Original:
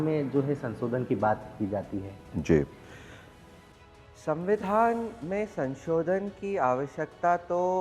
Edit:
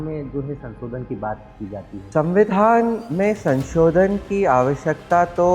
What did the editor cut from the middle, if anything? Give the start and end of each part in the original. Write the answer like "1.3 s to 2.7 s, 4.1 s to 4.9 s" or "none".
2.1 s to 4.2 s